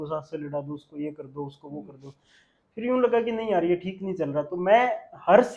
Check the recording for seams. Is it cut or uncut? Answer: uncut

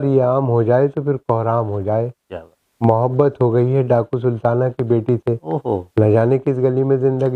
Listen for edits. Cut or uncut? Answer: uncut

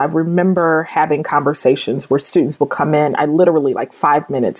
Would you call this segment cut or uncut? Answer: uncut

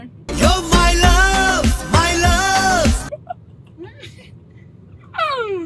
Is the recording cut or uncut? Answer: uncut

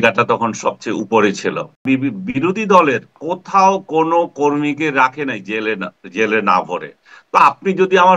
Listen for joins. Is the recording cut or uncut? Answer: cut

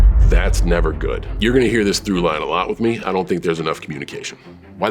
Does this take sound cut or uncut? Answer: cut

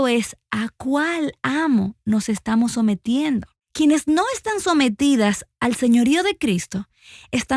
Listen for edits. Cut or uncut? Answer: cut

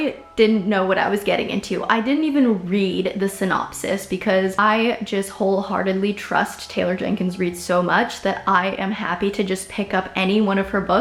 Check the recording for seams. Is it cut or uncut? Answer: uncut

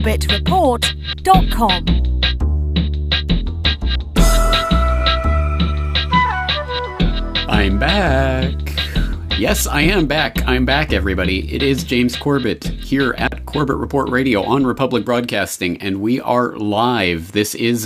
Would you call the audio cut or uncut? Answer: uncut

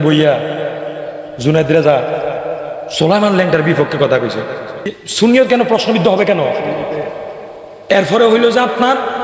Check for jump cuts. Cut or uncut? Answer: cut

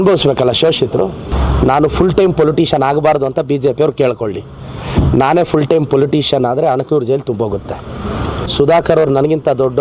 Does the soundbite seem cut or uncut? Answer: cut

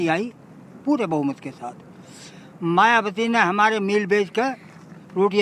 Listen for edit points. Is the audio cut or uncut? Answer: uncut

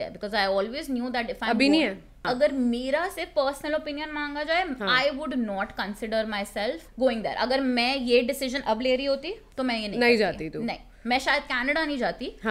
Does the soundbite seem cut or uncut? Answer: cut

